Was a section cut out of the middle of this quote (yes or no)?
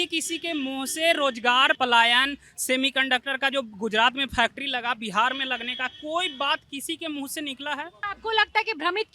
yes